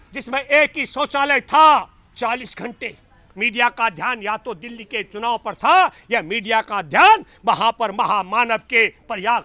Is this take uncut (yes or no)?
no